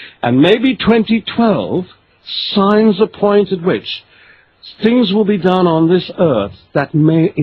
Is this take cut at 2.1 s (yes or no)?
no